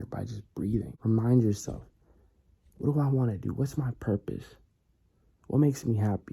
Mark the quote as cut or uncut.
cut